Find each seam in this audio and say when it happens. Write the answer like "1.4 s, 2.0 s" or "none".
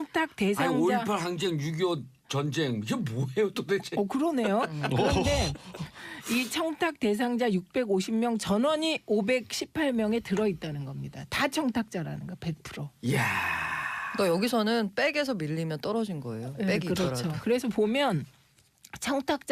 5.5 s